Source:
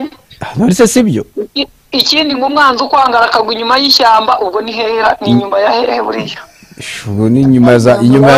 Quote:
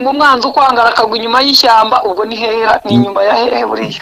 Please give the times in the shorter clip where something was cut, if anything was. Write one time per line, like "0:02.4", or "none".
none